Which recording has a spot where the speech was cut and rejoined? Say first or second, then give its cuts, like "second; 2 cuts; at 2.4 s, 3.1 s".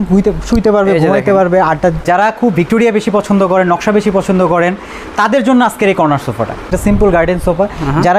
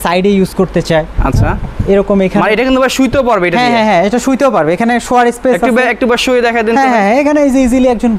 first; 2 cuts; at 2.0 s, 6.7 s